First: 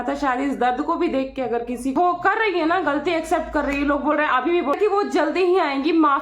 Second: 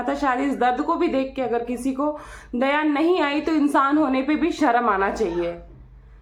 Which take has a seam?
first; 2 cuts; at 1.9 s, 4.8 s

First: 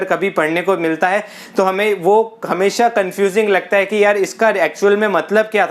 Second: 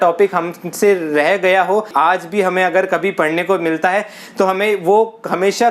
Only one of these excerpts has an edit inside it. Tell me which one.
second; 1 cut; at 1.9 s

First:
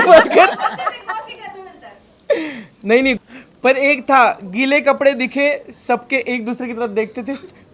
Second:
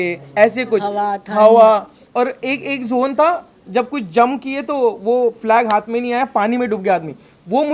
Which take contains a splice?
first; 1 cut; at 3.2 s

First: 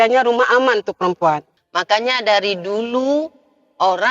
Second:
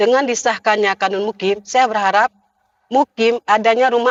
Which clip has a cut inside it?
first; 1 cut; at 1.6 s

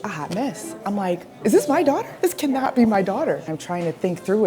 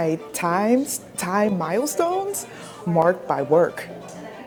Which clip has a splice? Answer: first; 2 cuts; at 1.3 s, 3.5 s

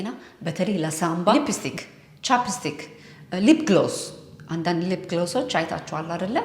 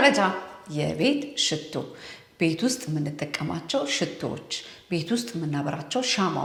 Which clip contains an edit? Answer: first; 1 cut; at 1.3 s

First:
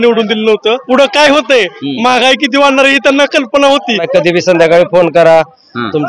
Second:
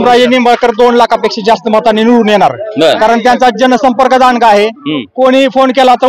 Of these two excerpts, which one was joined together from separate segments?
first; 2 cuts; at 0.8 s, 4.0 s

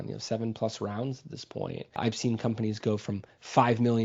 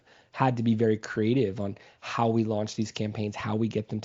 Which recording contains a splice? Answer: first; 1 cut; at 1.9 s

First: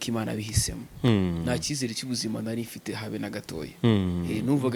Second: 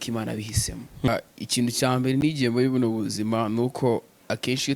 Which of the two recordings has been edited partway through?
second; 1 cut; at 1.1 s

